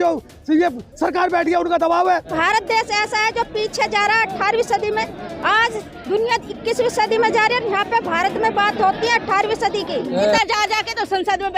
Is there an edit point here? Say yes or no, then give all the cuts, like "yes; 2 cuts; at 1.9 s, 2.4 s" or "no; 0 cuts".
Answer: yes; 2 cuts; at 2.3 s, 10.4 s